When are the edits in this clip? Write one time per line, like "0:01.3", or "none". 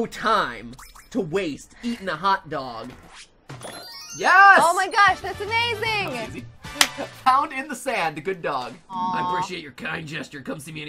0:03.0
0:09.0

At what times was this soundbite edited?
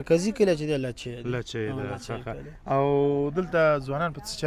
none

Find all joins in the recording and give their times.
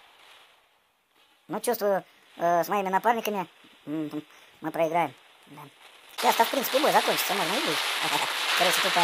0:06.0

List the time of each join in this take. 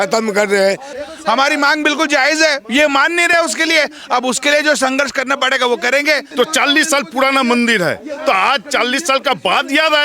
0:00.9
0:06.3

